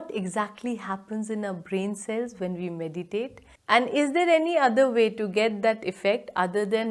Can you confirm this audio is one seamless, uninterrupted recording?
yes; 0 cuts

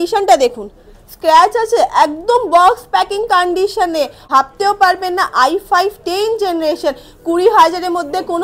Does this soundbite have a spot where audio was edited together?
yes; 1 cut; at 4.2 s

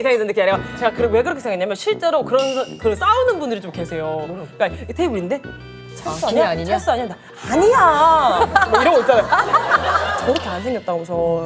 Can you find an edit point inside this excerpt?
yes; 1 cut; at 10.0 s

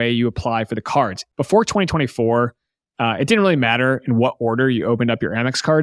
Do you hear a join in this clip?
yes; 1 cut; at 1.3 s

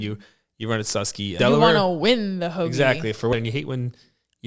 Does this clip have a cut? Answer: yes; 2 cuts; at 1.3 s, 3.3 s

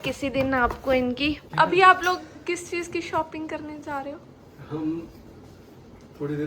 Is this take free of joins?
no; 1 cut; at 1.5 s

